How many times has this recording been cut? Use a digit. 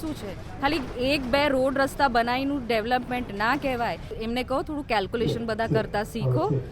1